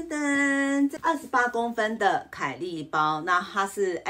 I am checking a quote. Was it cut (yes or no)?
no